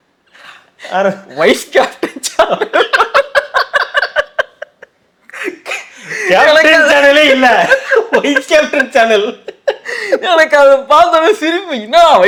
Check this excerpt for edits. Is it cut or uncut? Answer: uncut